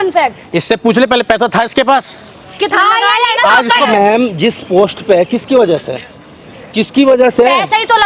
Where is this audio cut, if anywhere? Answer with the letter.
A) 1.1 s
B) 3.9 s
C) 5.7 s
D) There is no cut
B